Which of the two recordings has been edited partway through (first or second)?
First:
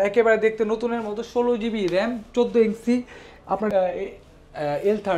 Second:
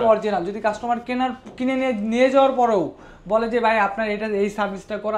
first